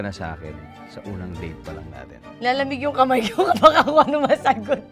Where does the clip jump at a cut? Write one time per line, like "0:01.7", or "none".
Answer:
none